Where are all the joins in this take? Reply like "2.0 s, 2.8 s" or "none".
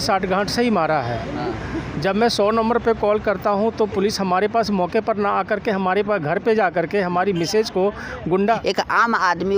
8.6 s